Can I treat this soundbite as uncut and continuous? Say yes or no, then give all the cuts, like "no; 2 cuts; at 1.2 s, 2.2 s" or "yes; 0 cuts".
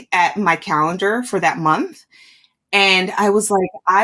yes; 0 cuts